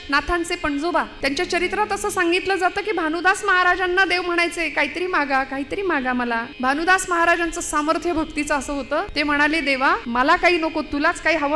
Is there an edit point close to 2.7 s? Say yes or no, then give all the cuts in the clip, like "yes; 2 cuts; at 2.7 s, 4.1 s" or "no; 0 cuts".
no; 4 cuts; at 1.1 s, 6.5 s, 9.1 s, 10.0 s